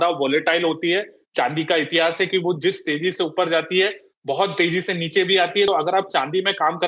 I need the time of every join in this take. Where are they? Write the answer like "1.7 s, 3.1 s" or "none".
5.7 s